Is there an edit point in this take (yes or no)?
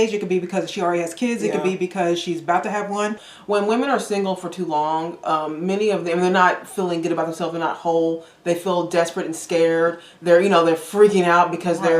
yes